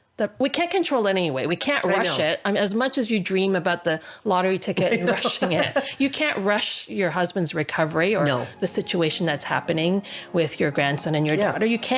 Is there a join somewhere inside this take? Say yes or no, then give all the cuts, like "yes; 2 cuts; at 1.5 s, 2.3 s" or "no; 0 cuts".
no; 0 cuts